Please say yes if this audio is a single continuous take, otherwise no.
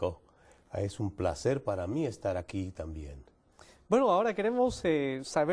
yes